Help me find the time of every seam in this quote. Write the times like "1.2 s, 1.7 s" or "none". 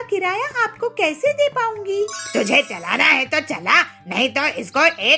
2.2 s

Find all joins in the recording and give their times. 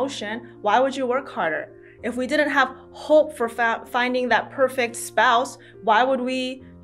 none

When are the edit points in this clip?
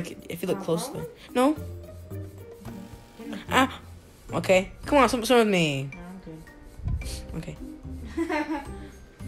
1.6 s, 3.2 s

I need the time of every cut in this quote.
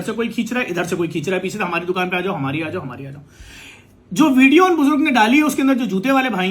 none

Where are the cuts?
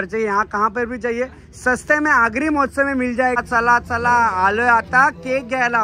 3.4 s

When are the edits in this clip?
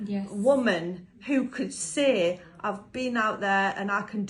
none

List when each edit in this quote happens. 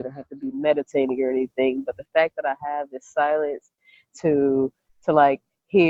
none

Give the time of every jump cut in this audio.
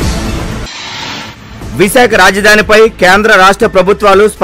1.1 s

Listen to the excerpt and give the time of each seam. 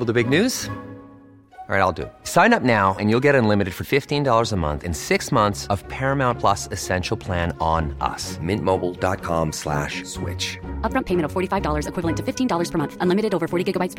none

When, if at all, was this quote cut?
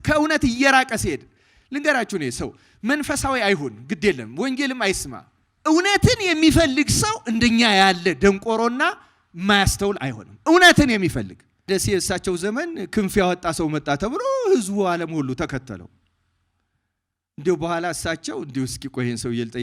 11.7 s

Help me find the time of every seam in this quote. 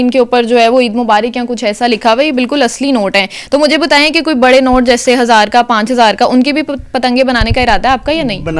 none

